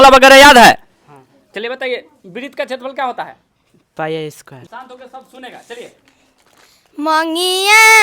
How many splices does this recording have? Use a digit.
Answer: 1